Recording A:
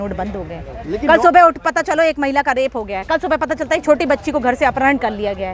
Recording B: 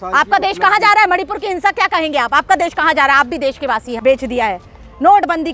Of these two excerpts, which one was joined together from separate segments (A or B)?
B